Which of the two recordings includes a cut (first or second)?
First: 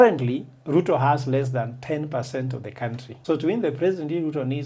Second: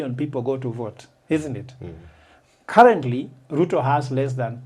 first